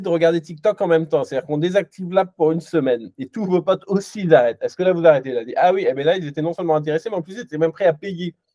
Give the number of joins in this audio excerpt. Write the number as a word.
zero